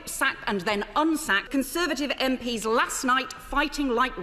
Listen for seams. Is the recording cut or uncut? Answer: cut